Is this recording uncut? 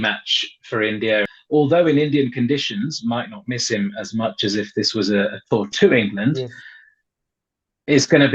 no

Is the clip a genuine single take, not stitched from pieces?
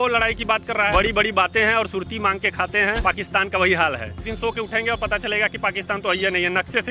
no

